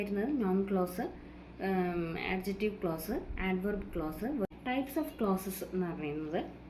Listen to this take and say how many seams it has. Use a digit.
1